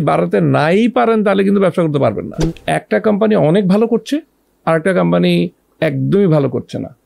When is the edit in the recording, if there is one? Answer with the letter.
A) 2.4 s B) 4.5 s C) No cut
A